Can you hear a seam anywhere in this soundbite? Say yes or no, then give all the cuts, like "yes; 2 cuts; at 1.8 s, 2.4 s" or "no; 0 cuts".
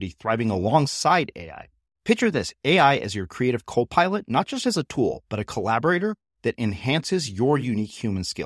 no; 0 cuts